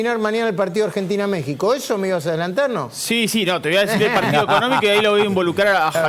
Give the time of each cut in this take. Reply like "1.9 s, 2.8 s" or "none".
none